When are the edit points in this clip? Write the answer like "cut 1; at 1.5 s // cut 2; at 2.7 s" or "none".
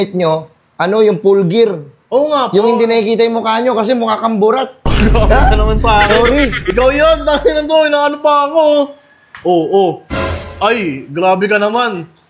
none